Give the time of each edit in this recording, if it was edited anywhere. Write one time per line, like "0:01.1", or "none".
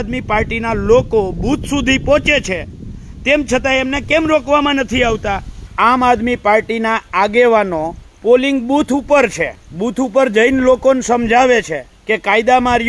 0:05.7